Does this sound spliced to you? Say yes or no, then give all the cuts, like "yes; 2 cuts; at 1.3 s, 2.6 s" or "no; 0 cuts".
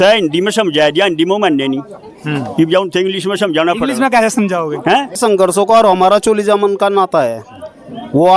yes; 1 cut; at 5.1 s